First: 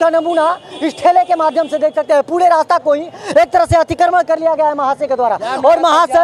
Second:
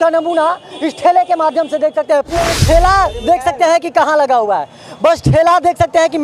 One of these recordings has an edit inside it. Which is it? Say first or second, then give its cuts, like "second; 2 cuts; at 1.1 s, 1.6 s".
second; 1 cut; at 2.3 s